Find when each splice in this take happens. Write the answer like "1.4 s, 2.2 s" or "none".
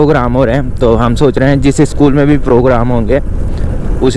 none